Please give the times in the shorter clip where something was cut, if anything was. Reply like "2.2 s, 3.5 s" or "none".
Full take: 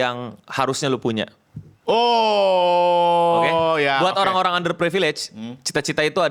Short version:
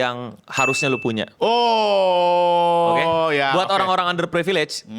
1.3 s